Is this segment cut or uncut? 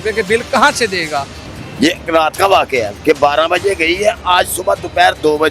cut